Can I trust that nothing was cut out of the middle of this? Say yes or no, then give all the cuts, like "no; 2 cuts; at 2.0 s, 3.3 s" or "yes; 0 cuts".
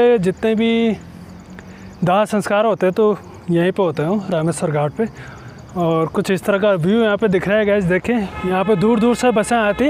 no; 1 cut; at 8.3 s